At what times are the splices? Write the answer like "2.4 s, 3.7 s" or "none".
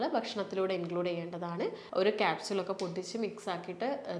1.8 s